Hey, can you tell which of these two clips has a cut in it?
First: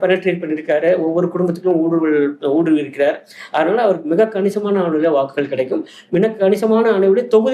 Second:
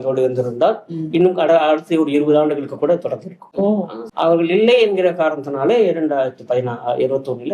second; 1 cut; at 4.0 s

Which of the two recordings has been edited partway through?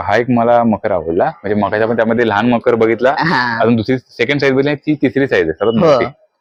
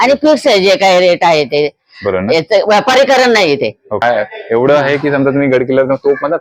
second; 1 cut; at 4.0 s

